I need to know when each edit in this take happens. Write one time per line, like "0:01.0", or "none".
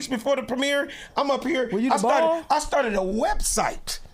none